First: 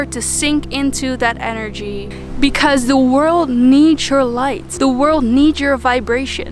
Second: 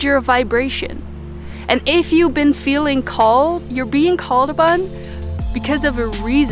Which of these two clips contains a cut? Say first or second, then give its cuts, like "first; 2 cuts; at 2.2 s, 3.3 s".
first; 2 cuts; at 2.2 s, 4.6 s